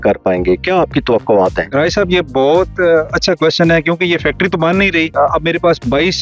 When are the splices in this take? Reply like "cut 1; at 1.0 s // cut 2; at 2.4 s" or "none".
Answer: cut 1; at 1.6 s // cut 2; at 5.1 s